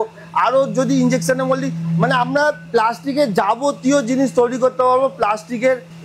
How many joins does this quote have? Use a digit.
0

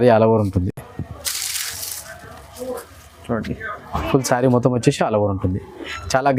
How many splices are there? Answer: 0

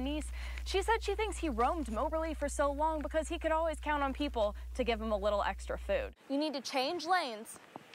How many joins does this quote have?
1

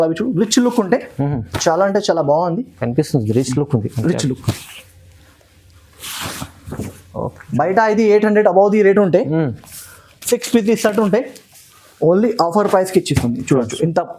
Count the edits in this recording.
0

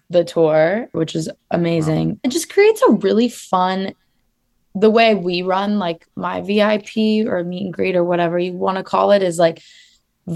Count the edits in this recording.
2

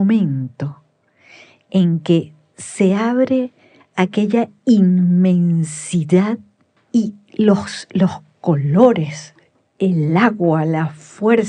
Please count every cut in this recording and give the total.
1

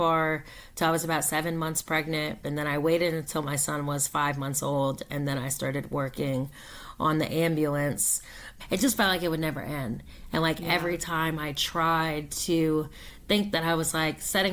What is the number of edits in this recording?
2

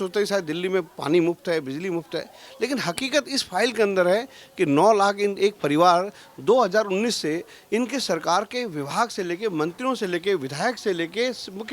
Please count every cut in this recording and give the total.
0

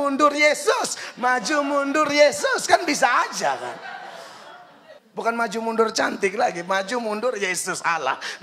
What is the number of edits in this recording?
1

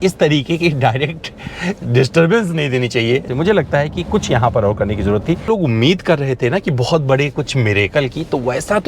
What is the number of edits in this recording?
2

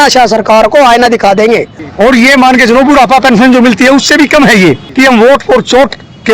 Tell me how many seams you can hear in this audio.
2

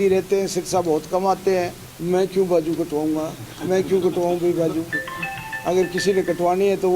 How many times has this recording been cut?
1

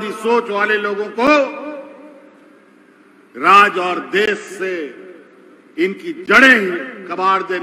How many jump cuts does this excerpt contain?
0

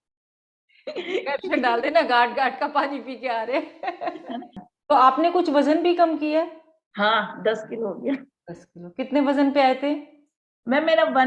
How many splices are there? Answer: 1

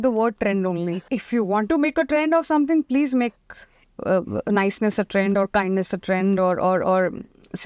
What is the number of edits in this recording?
1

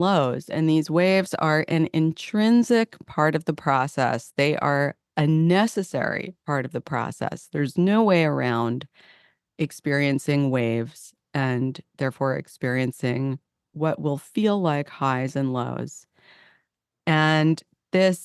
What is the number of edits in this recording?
0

